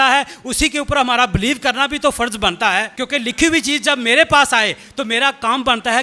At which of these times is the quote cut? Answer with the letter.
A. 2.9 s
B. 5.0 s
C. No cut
A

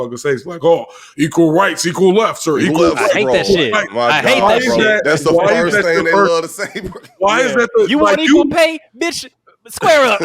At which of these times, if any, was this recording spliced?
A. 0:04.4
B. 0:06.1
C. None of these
A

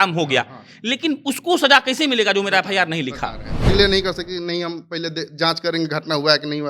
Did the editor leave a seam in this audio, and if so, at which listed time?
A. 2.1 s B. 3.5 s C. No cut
B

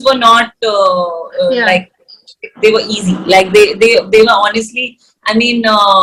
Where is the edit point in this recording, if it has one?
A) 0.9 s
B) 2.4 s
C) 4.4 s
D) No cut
D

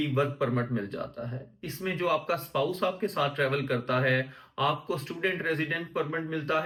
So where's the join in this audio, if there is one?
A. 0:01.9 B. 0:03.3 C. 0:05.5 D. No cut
D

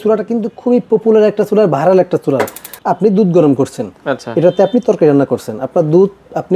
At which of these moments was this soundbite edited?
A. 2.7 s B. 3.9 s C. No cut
A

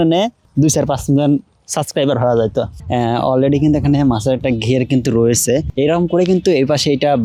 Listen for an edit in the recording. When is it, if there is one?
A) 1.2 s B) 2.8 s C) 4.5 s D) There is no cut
D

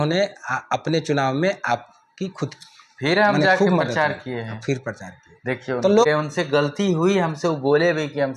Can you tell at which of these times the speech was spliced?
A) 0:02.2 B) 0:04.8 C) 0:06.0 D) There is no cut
C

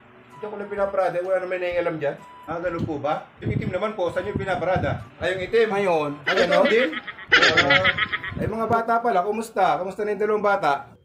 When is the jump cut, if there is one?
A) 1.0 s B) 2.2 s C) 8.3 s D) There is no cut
C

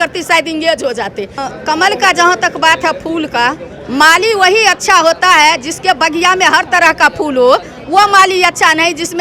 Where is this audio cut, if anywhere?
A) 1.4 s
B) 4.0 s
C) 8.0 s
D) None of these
A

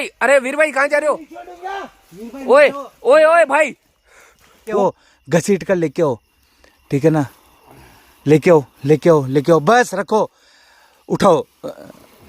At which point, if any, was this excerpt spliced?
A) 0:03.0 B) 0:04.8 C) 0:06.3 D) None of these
B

